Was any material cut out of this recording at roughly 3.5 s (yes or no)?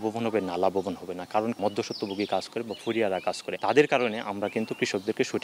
yes